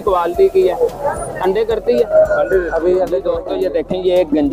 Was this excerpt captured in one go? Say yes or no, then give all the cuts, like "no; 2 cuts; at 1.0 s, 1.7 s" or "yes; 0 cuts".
no; 1 cut; at 3.4 s